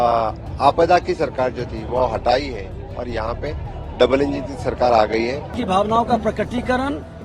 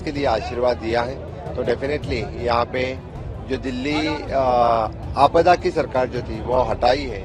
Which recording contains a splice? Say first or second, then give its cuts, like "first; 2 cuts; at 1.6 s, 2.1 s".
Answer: first; 1 cut; at 5.5 s